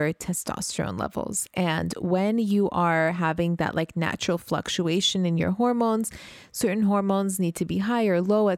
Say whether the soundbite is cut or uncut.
uncut